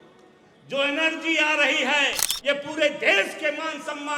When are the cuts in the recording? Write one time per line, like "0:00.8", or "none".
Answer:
0:02.2